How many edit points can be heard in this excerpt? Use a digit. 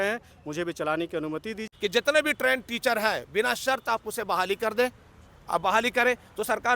1